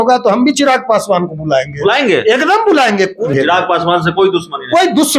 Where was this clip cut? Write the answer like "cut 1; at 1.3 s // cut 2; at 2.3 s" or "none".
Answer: cut 1; at 3.2 s